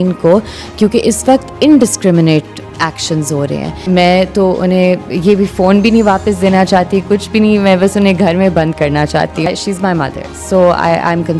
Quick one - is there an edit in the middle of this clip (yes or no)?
yes